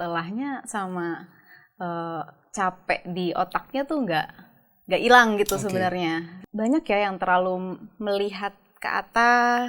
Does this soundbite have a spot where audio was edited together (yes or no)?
yes